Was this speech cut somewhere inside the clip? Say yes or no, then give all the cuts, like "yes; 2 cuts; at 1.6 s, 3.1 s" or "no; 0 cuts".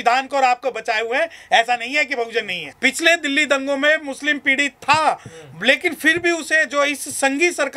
yes; 1 cut; at 2.6 s